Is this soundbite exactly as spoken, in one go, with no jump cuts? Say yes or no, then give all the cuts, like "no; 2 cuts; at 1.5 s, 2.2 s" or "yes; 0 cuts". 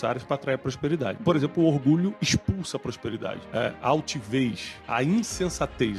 no; 3 cuts; at 2.2 s, 3.4 s, 4.7 s